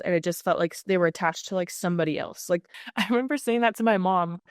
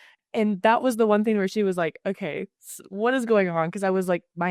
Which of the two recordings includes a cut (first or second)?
first